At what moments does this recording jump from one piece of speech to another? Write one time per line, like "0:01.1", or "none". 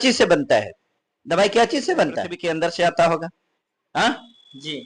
0:02.3

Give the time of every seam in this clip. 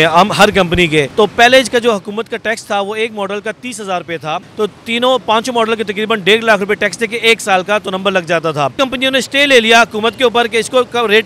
0:01.1
0:04.5
0:08.7

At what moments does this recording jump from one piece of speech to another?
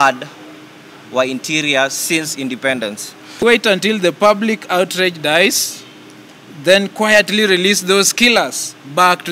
0:03.4

